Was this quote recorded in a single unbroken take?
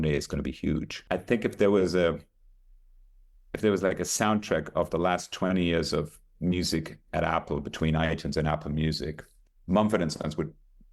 no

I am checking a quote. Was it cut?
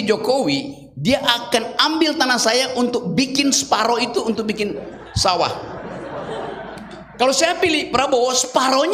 no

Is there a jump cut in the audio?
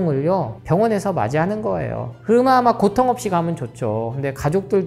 no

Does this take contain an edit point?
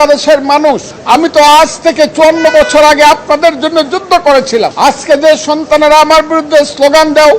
yes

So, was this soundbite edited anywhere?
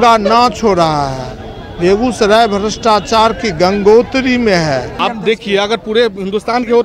yes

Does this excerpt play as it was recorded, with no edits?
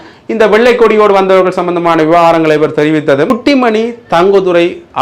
no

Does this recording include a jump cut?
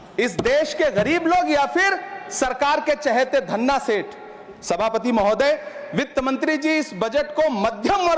no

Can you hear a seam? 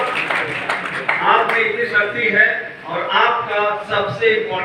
no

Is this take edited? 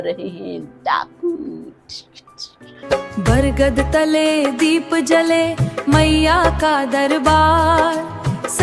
yes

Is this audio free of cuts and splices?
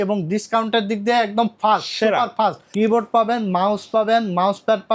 no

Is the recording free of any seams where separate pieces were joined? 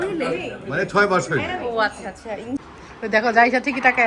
no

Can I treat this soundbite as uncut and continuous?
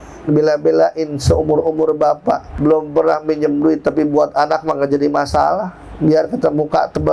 no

